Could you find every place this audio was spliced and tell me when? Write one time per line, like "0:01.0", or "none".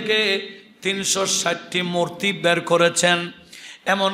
none